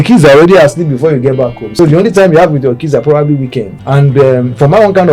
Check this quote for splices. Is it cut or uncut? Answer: cut